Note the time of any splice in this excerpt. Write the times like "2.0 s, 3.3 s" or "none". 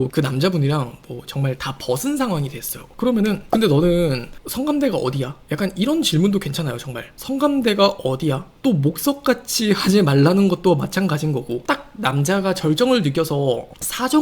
8.5 s, 11.6 s